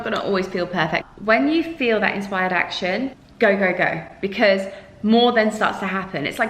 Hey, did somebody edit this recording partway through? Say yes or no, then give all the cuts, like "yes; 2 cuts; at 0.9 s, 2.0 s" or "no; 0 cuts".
yes; 2 cuts; at 1.1 s, 3.2 s